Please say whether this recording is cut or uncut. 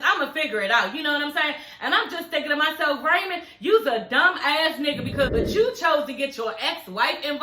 cut